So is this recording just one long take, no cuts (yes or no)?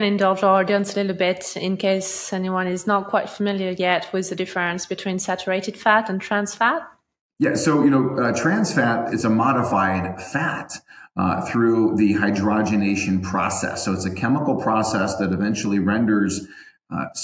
no